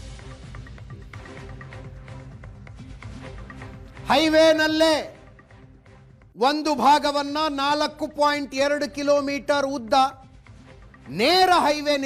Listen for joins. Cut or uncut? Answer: uncut